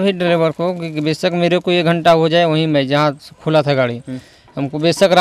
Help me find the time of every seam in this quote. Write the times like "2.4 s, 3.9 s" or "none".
none